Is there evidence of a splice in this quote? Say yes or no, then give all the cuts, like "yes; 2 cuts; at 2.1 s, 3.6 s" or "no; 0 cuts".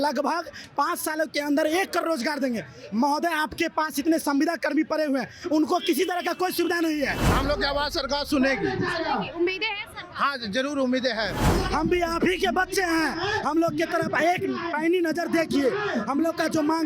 yes; 2 cuts; at 7.3 s, 11.5 s